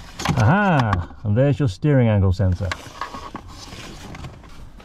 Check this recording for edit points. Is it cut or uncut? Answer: uncut